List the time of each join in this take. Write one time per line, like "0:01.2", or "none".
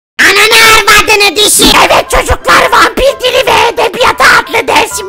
0:01.7